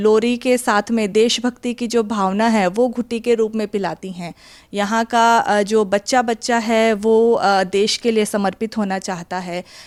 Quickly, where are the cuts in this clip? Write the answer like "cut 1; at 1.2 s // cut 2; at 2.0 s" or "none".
none